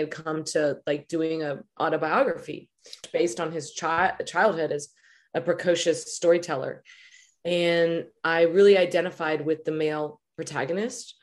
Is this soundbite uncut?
no; 1 cut; at 3.0 s

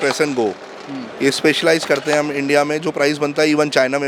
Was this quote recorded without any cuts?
yes; 0 cuts

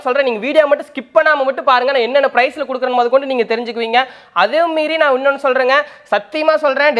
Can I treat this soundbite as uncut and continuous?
yes; 0 cuts

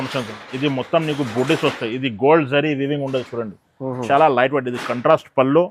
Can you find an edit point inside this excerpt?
no; 0 cuts

